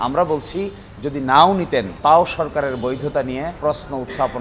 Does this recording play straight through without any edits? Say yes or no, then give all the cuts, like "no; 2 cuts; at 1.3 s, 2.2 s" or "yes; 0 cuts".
no; 2 cuts; at 1.9 s, 3.5 s